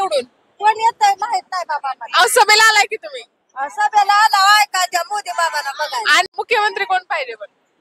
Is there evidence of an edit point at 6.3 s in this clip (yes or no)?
yes